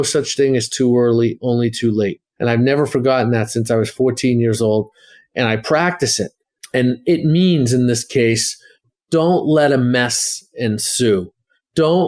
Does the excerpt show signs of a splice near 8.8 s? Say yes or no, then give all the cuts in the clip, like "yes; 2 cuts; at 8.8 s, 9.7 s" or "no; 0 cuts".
yes; 1 cut; at 8.8 s